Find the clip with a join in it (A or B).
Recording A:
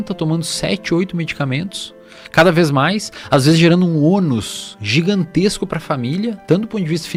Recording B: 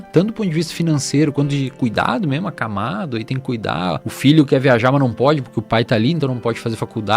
B